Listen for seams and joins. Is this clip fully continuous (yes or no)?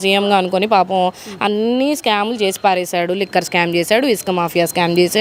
yes